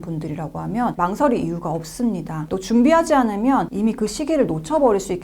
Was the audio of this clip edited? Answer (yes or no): no